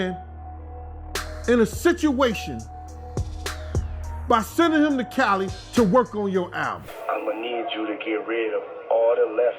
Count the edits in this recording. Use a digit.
1